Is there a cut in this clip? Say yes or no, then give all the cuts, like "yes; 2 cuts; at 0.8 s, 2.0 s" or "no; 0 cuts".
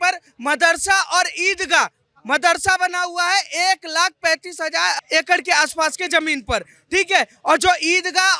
yes; 1 cut; at 5.0 s